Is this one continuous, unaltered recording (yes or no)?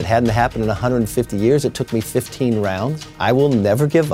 no